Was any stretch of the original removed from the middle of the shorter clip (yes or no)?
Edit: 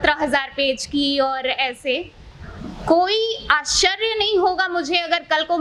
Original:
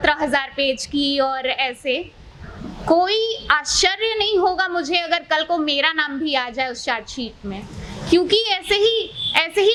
no